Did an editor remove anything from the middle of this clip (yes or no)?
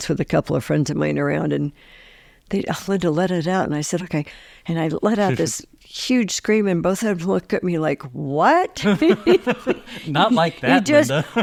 no